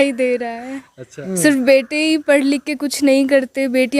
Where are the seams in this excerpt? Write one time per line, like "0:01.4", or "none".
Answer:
0:01.2